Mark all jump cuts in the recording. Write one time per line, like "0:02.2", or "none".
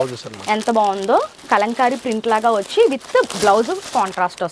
none